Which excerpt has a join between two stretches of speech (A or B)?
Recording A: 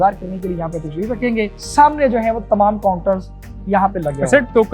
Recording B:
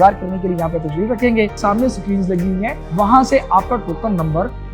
B